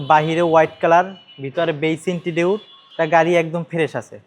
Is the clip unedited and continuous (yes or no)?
no